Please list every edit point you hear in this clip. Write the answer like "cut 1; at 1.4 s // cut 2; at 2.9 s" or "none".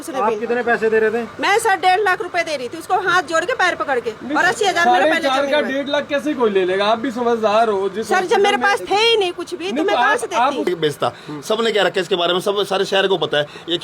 cut 1; at 10.7 s